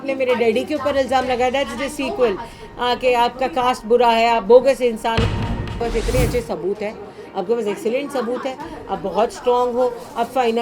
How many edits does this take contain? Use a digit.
1